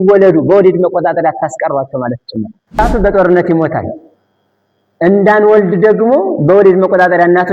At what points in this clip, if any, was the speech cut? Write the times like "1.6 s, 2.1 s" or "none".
2.8 s